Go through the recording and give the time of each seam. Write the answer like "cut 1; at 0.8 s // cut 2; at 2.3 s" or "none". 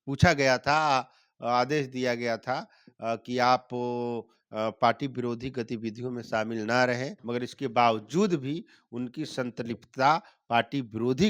cut 1; at 7.1 s